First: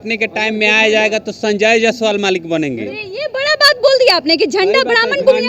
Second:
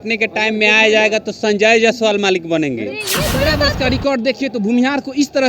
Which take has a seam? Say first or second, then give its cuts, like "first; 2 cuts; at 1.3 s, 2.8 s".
second; 1 cut; at 3.3 s